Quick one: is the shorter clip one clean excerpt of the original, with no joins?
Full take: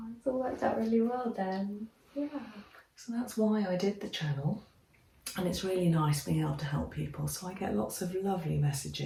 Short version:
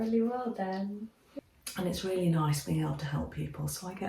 no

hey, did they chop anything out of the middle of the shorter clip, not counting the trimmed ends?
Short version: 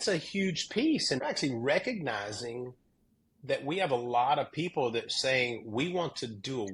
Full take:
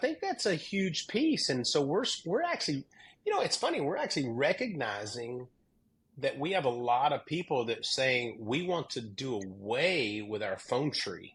yes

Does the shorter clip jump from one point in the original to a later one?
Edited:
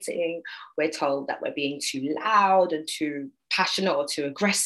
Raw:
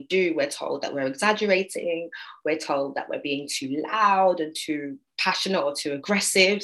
no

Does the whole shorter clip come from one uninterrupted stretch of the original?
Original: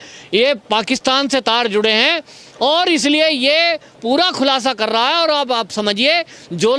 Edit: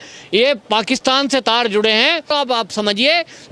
no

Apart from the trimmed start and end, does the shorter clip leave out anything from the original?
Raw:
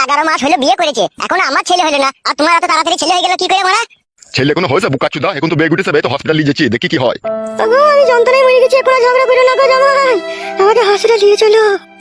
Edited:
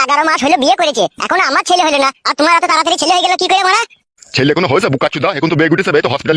no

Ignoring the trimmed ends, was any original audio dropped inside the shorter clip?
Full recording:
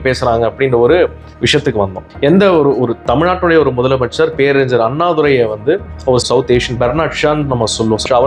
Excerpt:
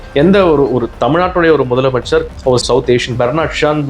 yes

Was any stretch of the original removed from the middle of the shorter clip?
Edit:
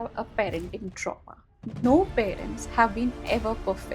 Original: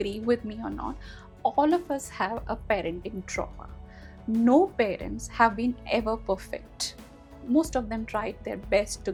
yes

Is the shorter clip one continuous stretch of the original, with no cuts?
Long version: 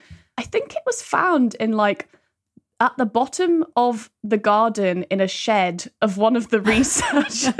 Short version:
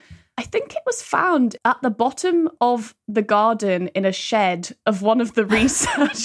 no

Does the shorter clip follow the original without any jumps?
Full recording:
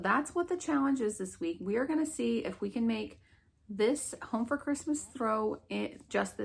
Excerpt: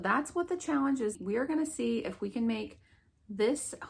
no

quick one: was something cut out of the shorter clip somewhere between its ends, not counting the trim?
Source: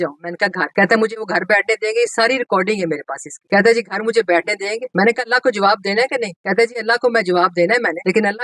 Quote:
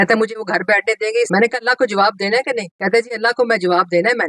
yes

